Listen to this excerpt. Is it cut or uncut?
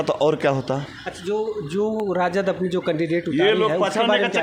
uncut